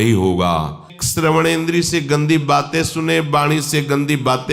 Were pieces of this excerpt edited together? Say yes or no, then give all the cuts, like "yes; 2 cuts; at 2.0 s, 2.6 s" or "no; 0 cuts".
yes; 1 cut; at 0.9 s